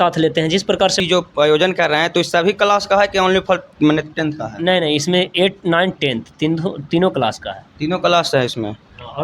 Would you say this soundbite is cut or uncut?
cut